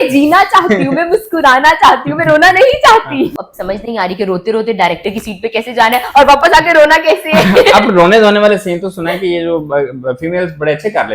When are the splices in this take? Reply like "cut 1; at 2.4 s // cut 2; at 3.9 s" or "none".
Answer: cut 1; at 3.4 s